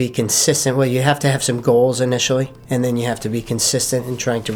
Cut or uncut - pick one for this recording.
uncut